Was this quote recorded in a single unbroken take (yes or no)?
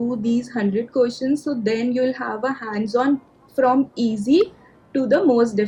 yes